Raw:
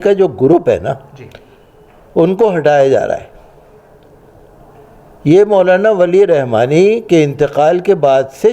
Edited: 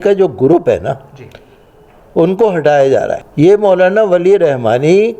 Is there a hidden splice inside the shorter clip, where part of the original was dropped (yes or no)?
yes